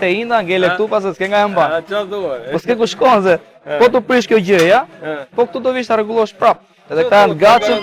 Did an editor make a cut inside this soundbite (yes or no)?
no